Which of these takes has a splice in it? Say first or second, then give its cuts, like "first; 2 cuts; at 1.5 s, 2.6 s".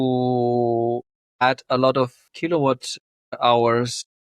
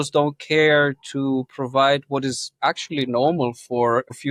first; 1 cut; at 2.2 s